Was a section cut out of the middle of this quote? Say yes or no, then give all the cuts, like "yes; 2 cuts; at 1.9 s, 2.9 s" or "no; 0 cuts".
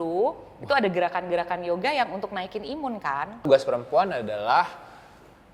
yes; 1 cut; at 3.5 s